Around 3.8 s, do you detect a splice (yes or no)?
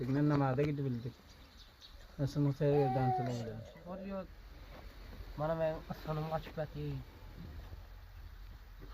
yes